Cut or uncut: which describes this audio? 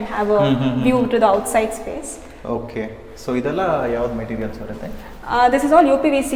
uncut